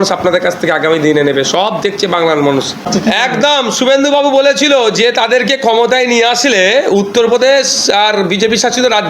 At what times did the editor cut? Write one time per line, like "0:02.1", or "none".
0:02.9